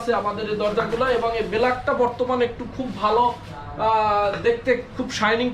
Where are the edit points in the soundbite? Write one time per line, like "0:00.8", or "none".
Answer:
none